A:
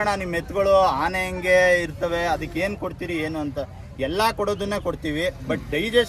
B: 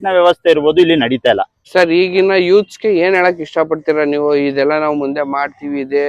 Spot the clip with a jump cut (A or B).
B